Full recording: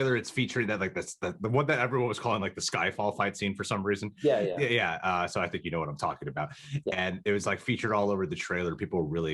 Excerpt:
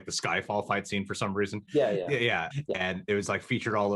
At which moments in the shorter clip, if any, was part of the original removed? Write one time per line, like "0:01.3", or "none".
0:02.5